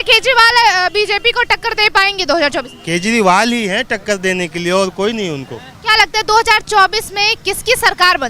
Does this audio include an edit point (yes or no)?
no